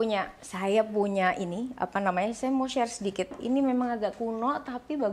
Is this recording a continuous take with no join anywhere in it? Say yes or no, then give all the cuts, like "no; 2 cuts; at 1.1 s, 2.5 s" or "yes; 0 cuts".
yes; 0 cuts